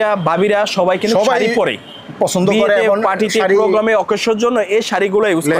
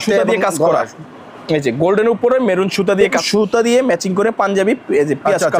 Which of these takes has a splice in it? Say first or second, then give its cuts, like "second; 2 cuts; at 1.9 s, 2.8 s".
second; 1 cut; at 3.2 s